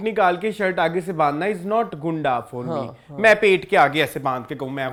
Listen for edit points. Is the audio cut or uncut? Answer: uncut